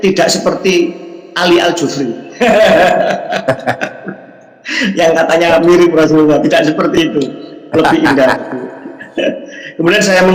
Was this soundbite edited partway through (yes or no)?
no